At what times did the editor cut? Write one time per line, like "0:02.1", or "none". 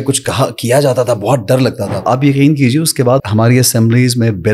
0:02.0
0:03.2

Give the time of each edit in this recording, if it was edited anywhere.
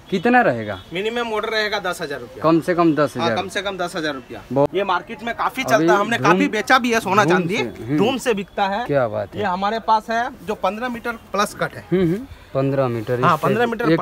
0:04.7

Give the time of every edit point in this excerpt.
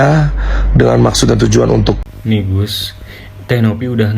0:02.0

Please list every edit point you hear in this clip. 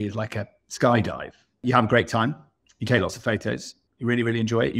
0:01.5
0:03.8

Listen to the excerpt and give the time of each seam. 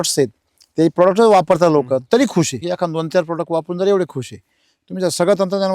0:02.6

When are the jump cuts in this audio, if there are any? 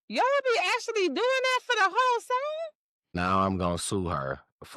0:03.1

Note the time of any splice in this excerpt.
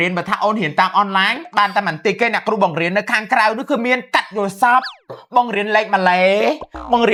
none

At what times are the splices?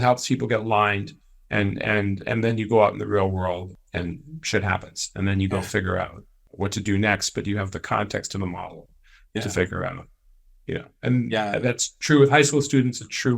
0:03.7
0:06.4

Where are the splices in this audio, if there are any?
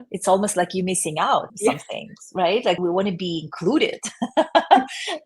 0:01.5
0:02.8

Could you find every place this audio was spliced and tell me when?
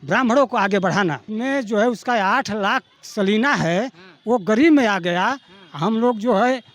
0:01.2

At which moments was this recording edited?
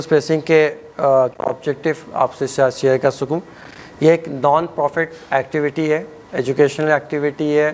none

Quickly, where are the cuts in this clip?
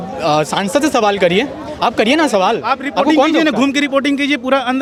none

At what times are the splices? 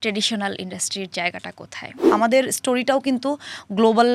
0:02.1

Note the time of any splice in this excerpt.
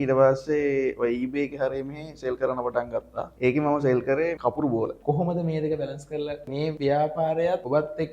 0:05.0

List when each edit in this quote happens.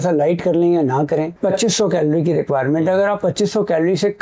0:01.3

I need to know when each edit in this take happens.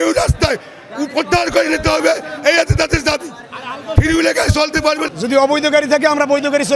0:05.1

